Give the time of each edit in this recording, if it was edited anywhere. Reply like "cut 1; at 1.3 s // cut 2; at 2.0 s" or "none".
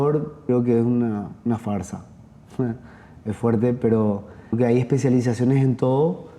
cut 1; at 4.5 s